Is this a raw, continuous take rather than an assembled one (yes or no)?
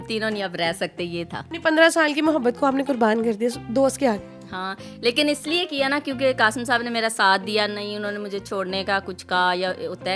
yes